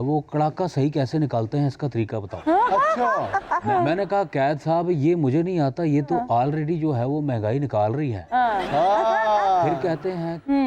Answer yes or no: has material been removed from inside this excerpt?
no